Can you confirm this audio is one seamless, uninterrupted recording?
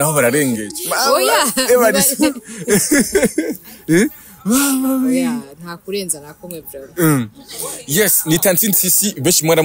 yes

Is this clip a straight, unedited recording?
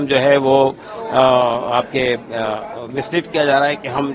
yes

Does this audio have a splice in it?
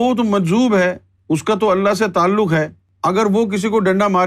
yes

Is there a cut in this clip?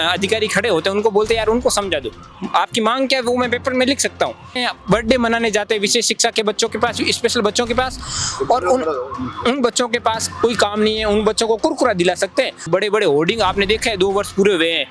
yes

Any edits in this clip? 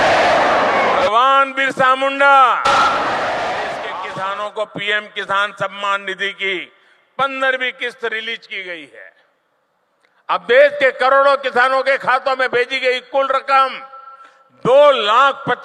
yes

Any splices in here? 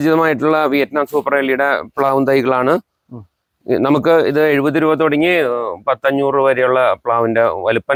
no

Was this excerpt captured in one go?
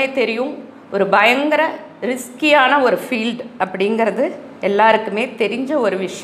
yes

